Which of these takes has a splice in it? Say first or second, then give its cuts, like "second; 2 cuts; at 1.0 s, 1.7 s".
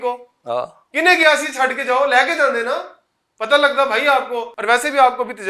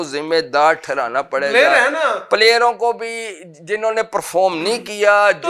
first; 1 cut; at 4.5 s